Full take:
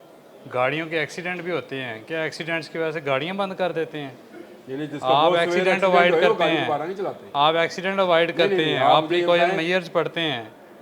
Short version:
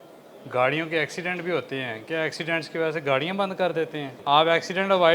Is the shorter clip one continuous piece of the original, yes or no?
no